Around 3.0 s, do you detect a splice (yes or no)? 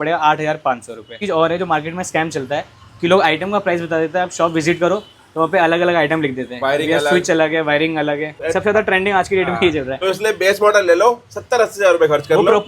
no